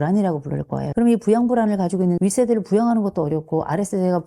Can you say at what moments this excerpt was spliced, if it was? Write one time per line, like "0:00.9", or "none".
0:02.2